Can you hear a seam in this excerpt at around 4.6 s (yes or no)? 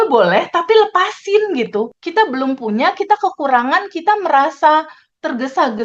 no